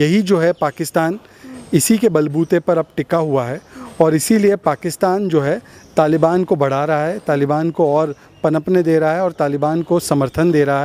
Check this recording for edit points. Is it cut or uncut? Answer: uncut